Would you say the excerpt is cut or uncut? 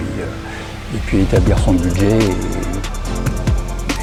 uncut